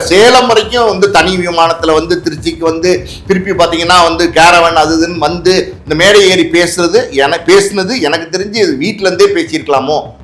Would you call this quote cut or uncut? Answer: uncut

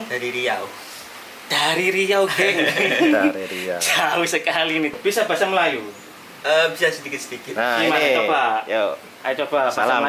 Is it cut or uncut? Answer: uncut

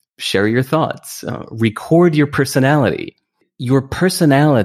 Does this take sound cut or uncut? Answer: cut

